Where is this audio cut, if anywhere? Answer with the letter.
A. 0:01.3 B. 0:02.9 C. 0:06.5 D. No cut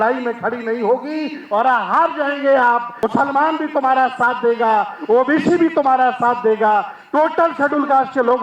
B